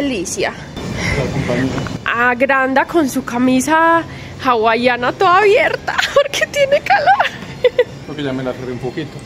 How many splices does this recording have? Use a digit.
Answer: 0